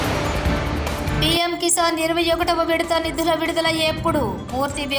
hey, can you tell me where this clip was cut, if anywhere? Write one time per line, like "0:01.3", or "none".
0:01.1